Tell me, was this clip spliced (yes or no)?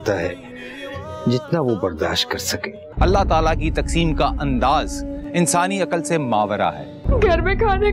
yes